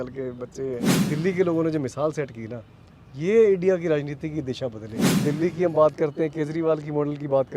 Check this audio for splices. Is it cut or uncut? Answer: cut